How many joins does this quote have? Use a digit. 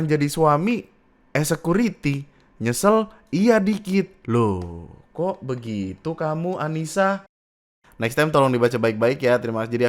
1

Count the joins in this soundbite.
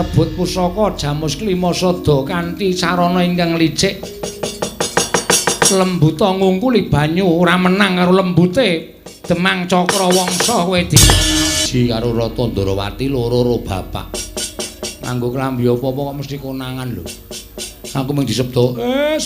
1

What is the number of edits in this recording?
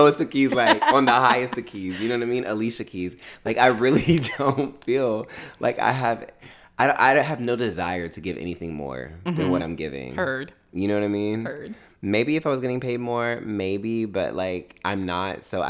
0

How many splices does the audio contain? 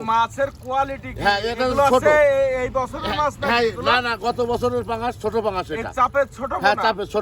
0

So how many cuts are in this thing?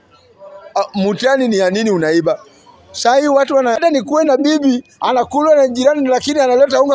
1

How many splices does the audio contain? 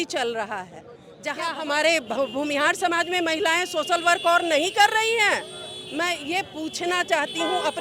1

